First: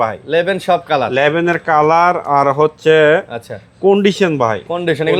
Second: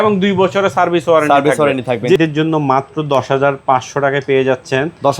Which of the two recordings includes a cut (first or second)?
second